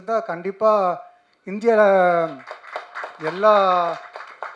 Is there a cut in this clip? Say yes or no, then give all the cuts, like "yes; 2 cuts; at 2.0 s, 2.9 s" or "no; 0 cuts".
no; 0 cuts